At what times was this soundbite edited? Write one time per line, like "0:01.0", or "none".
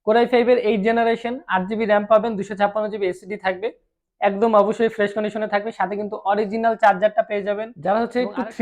0:07.7